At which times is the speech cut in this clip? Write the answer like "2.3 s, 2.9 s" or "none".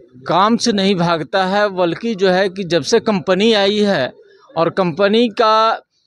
none